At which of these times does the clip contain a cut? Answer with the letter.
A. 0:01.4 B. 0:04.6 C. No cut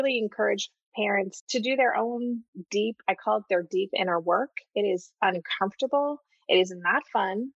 A